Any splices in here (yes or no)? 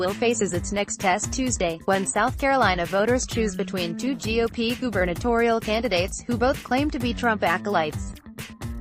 yes